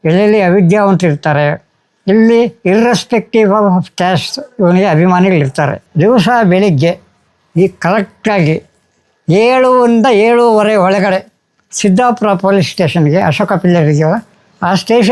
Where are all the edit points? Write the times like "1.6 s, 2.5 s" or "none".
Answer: 5.8 s